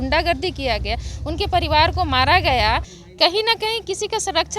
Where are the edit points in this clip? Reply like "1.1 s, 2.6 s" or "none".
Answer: 3.0 s